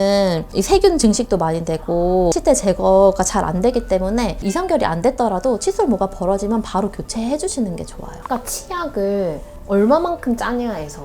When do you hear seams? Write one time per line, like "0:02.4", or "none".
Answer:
0:04.4
0:08.2